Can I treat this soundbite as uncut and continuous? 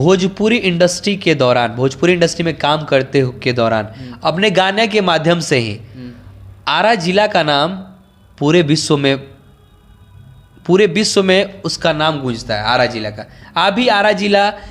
yes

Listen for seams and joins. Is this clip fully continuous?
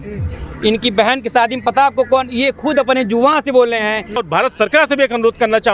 no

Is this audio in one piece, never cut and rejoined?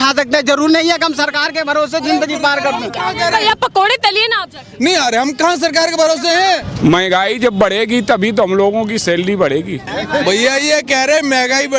no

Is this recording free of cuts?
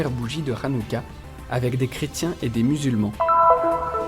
no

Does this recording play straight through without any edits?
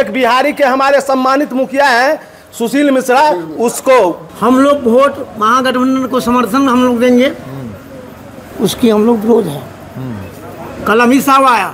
no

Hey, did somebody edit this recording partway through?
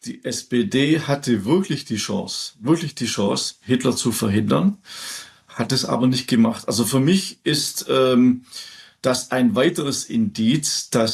no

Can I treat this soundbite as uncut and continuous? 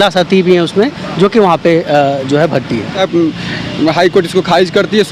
no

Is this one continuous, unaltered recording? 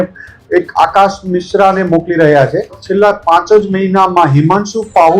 no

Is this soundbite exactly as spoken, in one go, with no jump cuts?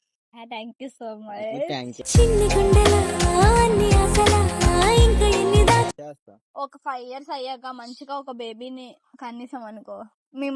no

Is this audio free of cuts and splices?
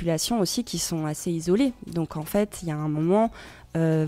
yes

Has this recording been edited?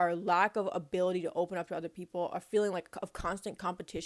no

